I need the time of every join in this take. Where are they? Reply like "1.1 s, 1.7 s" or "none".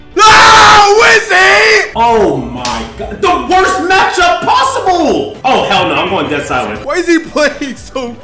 6.8 s